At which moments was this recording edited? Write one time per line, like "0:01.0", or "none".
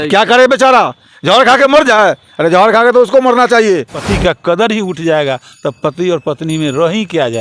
0:04.0